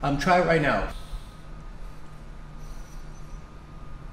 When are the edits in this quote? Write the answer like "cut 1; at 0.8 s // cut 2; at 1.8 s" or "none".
cut 1; at 0.9 s